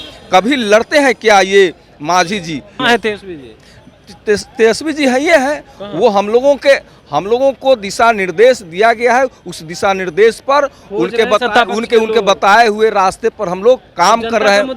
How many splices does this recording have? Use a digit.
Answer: 1